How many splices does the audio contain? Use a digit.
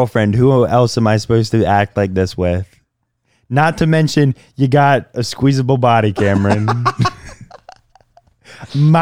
0